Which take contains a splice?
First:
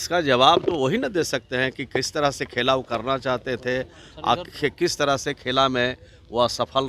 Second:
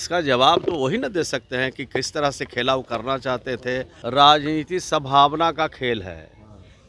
second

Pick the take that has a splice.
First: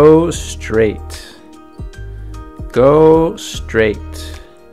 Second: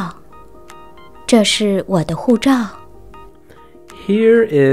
first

